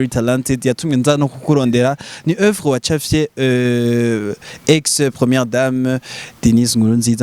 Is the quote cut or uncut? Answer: uncut